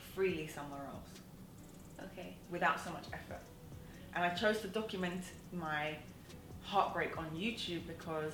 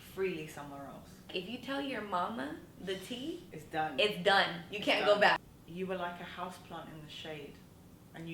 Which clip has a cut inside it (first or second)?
second